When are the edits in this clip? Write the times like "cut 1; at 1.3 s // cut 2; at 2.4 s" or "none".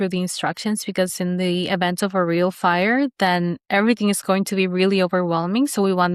none